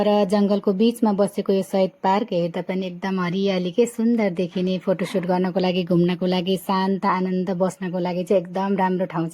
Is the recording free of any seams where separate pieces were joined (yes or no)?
yes